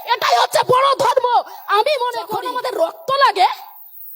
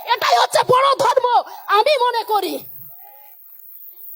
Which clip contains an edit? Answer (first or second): first